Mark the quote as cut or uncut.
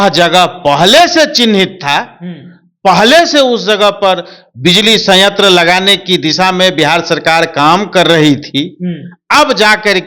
uncut